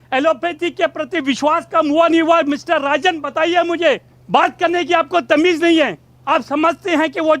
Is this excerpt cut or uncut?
cut